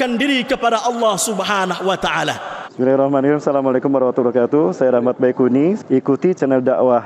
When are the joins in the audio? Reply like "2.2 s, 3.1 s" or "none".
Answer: 2.6 s

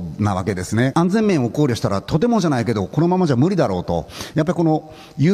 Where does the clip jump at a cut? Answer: 0.9 s, 4.1 s

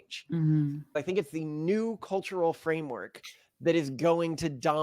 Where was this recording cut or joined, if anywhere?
0.9 s

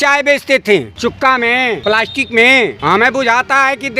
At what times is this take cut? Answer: 0.9 s, 1.8 s, 2.8 s

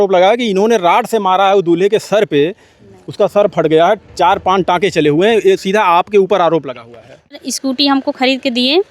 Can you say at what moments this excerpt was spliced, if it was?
7.4 s

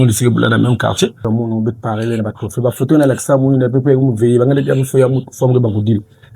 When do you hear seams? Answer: 1.2 s

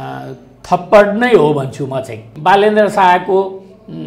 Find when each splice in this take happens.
2.3 s

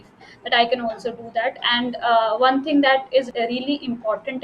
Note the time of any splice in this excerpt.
3.3 s

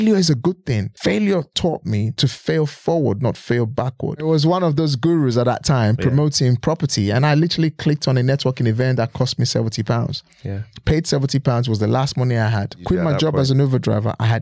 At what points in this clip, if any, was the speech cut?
0.9 s, 2.1 s, 4.2 s, 12.8 s

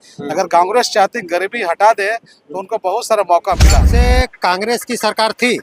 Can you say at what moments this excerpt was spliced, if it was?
3.9 s

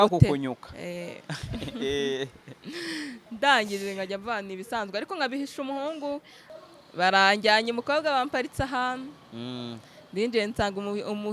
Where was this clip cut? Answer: 6.4 s

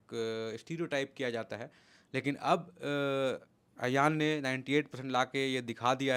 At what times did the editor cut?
none

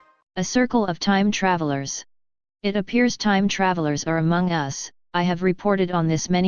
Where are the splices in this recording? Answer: 1.6 s

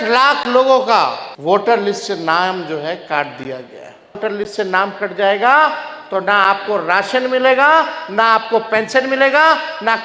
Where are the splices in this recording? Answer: 1.3 s, 4.2 s

